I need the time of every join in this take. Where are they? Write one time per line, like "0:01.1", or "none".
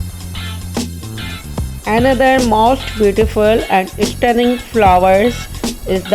0:01.2